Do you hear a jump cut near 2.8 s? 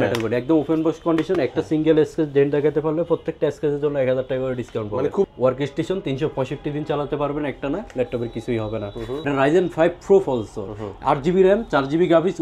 no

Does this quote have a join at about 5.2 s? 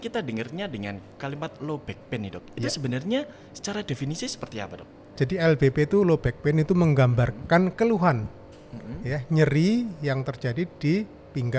yes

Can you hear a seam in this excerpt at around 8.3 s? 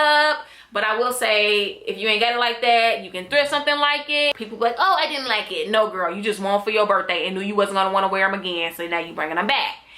no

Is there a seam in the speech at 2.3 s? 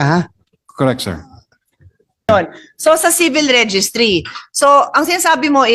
yes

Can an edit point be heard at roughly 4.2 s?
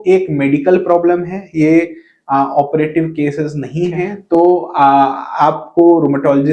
yes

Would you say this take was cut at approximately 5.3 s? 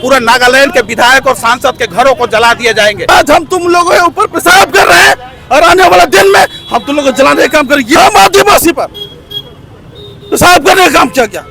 no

